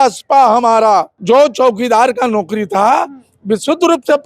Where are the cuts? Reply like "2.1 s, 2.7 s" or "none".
1.1 s